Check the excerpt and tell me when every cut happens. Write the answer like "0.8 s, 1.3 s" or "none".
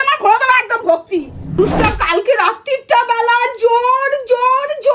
1.6 s